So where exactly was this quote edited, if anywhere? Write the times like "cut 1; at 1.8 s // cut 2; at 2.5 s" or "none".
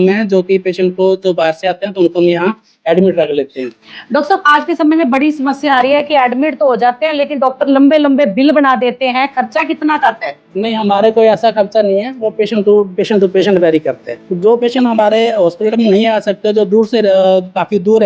cut 1; at 14.3 s

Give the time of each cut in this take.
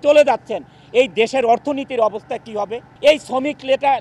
cut 1; at 2.8 s

